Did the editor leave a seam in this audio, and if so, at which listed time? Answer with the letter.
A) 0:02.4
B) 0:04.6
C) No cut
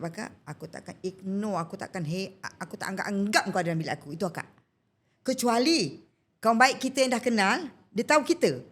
C